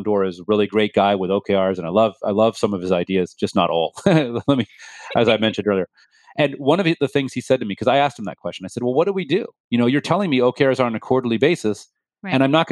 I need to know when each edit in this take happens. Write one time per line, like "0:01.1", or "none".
none